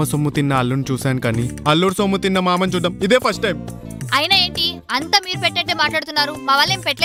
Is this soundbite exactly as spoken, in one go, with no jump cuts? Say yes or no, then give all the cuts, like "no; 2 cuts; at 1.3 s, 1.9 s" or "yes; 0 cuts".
yes; 0 cuts